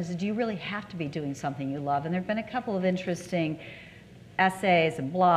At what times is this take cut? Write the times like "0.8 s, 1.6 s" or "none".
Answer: none